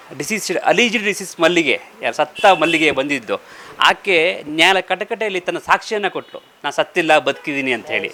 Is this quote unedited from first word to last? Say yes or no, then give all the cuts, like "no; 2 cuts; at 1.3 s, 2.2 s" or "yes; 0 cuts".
yes; 0 cuts